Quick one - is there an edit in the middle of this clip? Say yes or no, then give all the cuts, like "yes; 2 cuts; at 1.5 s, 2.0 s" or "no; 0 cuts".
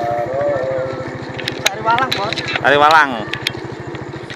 no; 0 cuts